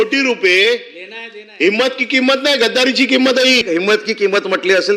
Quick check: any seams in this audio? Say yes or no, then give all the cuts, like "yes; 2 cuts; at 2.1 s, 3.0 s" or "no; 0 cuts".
yes; 1 cut; at 3.6 s